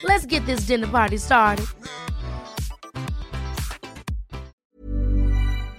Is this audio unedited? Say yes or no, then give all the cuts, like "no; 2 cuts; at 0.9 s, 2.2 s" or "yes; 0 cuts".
no; 1 cut; at 4.6 s